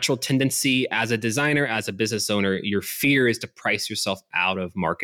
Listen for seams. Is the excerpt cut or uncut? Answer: uncut